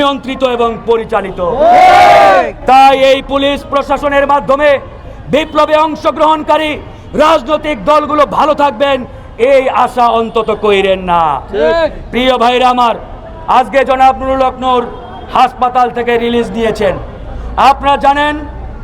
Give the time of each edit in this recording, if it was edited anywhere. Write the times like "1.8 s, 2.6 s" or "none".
none